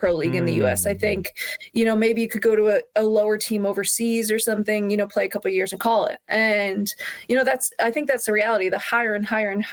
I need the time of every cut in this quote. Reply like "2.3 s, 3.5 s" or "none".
none